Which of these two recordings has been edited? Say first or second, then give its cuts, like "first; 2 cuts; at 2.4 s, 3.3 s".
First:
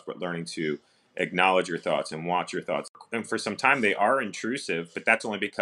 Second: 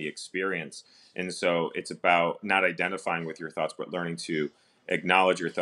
first; 1 cut; at 3.0 s